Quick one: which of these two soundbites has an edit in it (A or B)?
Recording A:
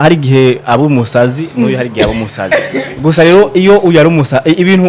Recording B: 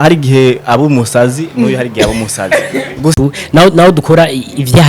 B